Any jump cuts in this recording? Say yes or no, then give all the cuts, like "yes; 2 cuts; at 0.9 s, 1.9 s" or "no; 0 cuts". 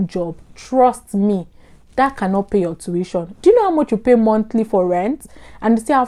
no; 0 cuts